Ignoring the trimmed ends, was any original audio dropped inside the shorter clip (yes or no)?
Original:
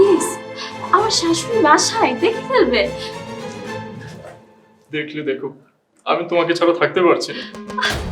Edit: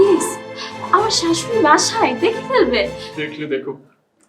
yes